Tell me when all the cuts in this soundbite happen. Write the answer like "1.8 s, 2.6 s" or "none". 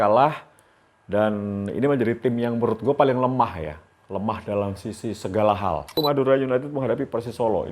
5.9 s